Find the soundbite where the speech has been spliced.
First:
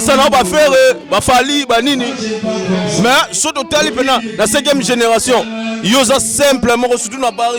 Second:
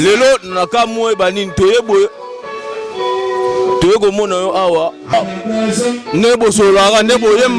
second; 1 cut; at 5.1 s

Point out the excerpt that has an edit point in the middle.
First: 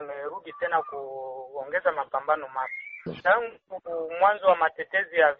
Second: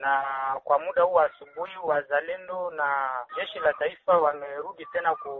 first; 1 cut; at 3.1 s

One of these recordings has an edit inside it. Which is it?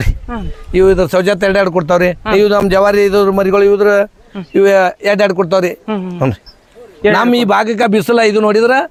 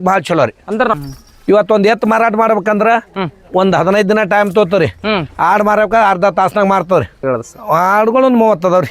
second; 2 cuts; at 0.9 s, 7.2 s

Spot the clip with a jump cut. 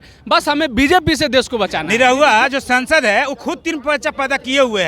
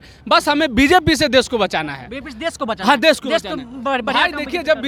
first; 1 cut; at 1.8 s

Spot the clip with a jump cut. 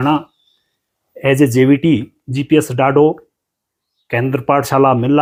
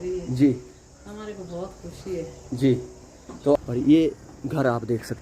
second; 1 cut; at 3.6 s

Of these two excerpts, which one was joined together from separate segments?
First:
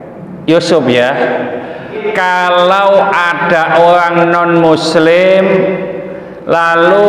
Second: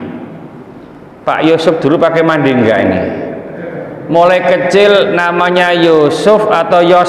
first; 1 cut; at 2.1 s

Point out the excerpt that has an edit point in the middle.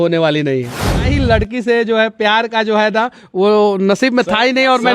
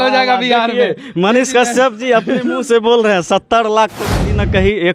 first; 1 cut; at 1.1 s

